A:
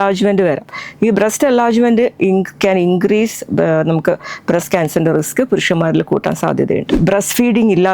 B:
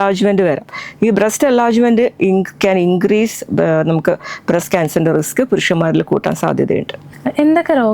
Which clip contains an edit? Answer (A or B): A